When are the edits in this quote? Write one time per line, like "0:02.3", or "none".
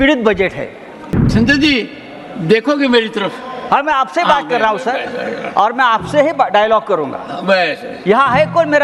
0:01.1